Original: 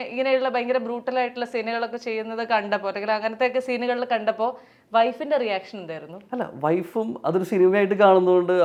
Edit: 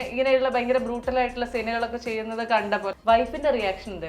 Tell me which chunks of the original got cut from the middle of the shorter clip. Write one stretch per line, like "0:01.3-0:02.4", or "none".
0:02.9-0:04.8